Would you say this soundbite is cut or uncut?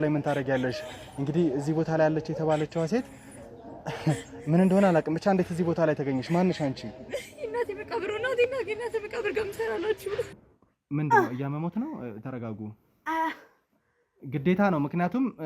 cut